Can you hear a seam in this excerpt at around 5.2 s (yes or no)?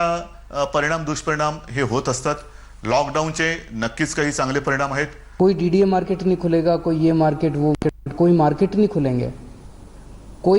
yes